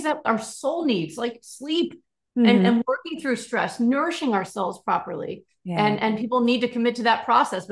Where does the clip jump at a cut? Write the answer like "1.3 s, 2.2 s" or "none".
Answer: none